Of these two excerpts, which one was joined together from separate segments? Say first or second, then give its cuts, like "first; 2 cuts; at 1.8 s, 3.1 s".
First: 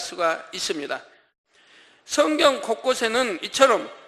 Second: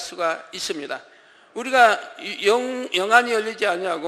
first; 1 cut; at 1.3 s